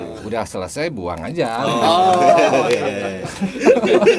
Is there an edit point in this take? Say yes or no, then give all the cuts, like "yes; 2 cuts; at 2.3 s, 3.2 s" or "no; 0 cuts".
no; 0 cuts